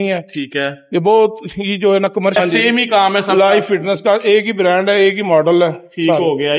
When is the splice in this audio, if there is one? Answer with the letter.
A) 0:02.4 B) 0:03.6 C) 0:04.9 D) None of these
A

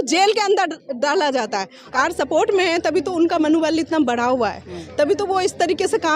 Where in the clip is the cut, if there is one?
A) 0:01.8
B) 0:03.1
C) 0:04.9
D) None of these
A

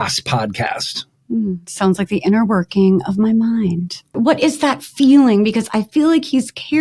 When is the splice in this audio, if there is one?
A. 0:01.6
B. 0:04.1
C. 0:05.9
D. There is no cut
B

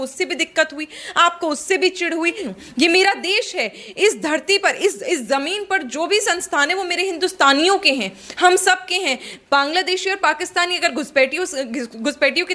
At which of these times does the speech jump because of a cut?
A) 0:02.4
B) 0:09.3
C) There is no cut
A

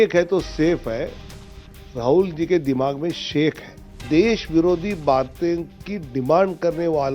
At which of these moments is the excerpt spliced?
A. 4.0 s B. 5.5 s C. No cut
A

